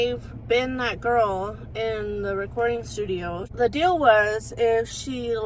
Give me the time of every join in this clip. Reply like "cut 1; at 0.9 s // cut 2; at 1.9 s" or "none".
cut 1; at 3.5 s